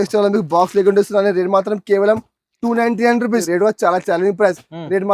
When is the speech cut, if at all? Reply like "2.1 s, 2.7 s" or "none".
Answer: 3.5 s